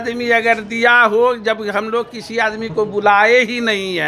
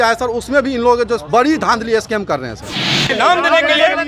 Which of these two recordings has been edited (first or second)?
second